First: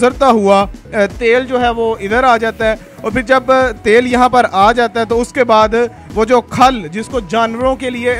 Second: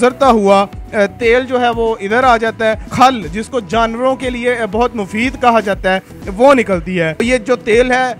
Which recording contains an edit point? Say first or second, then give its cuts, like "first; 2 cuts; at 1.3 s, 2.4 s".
second; 2 cuts; at 2.9 s, 7.2 s